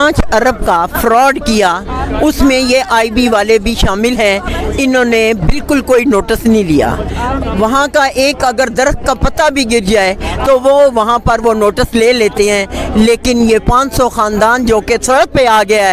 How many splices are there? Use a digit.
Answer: 0